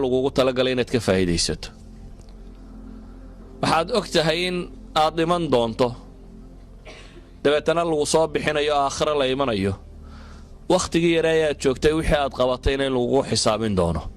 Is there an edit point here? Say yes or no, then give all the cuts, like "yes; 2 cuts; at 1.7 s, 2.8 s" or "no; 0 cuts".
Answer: yes; 2 cuts; at 1.8 s, 3.1 s